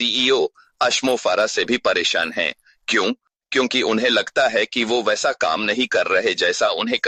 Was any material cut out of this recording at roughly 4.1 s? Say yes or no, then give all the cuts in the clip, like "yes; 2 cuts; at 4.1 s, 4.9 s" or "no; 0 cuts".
no; 0 cuts